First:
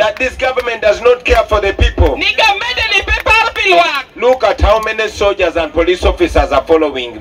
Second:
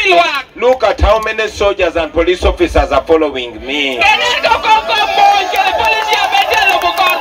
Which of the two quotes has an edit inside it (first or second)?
second